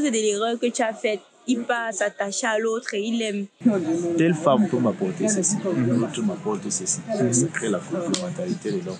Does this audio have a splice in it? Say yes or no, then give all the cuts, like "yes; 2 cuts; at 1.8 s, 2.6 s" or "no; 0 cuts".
yes; 1 cut; at 3.5 s